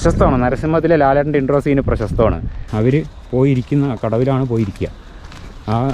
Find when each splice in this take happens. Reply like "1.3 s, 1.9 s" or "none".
2.6 s